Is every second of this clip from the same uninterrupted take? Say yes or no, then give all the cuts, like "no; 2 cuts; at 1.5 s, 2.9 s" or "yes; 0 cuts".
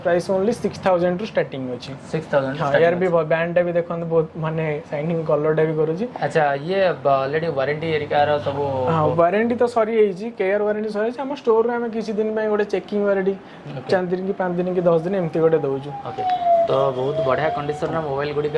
yes; 0 cuts